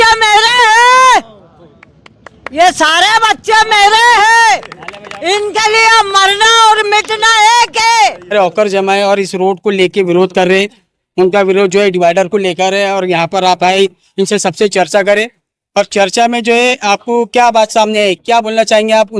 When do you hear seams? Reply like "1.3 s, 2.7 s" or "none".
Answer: none